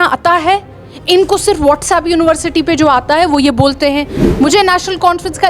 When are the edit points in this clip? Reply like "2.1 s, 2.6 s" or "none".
4.2 s